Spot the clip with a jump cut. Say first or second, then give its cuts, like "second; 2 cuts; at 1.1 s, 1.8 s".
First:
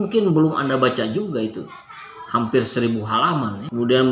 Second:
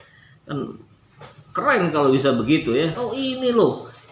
second; 1 cut; at 2.9 s